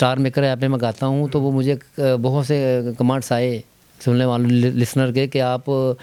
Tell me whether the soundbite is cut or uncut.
uncut